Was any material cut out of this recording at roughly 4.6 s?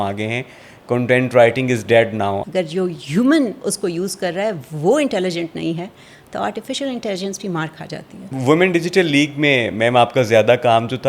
no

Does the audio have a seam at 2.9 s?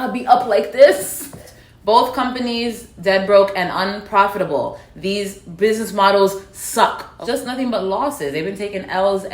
no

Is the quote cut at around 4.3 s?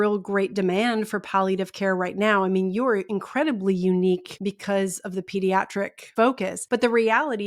yes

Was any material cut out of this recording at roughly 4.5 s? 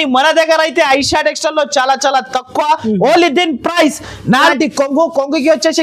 yes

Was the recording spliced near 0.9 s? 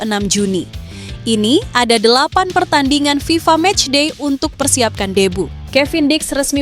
no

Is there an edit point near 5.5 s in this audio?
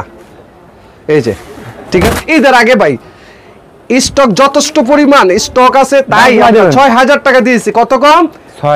no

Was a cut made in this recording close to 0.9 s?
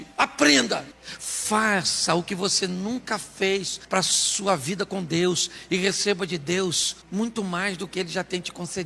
yes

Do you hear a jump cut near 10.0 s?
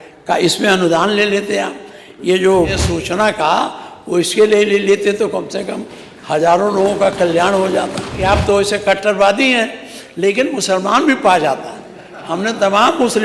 no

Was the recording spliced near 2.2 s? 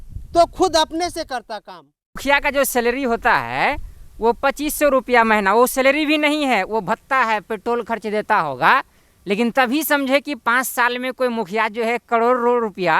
yes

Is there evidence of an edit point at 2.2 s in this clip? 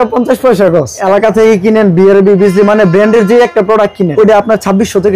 no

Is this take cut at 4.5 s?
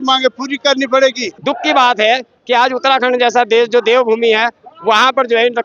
no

